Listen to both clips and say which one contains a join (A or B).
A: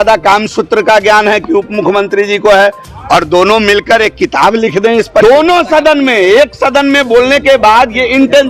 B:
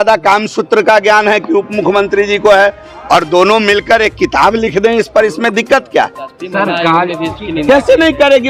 A